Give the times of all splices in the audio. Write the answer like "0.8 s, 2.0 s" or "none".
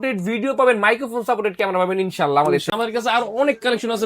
2.7 s